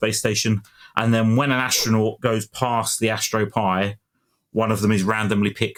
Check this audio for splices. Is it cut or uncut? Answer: uncut